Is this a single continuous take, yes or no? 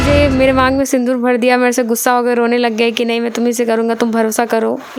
yes